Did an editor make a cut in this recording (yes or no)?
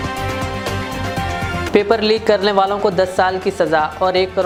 no